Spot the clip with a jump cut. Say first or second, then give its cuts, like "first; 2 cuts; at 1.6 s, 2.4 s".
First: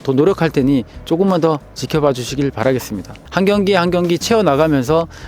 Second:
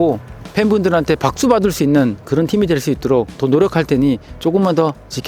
first; 1 cut; at 3.2 s